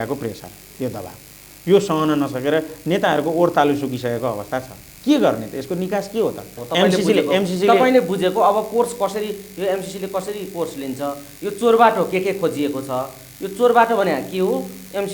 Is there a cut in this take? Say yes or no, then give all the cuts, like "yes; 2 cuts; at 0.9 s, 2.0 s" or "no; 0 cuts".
yes; 1 cut; at 6.5 s